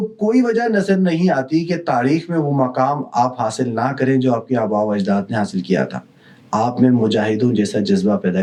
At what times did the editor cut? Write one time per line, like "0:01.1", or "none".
none